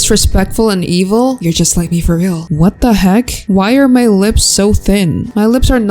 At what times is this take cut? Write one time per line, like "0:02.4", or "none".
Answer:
0:02.4